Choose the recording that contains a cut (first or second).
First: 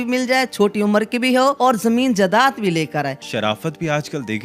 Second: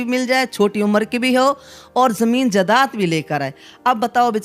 first